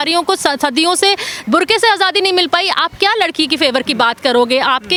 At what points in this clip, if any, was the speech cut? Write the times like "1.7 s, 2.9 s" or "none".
none